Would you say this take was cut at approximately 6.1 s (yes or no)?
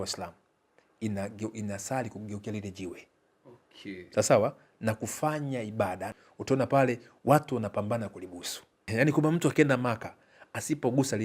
yes